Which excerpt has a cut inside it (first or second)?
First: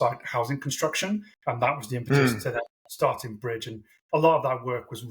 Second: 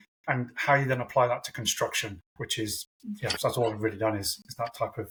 first